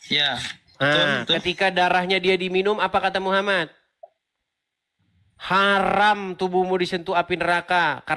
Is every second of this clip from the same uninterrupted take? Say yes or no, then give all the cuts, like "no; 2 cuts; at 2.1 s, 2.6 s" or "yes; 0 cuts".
yes; 0 cuts